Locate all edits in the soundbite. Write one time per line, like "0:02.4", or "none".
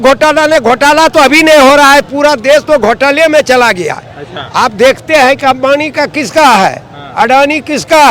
none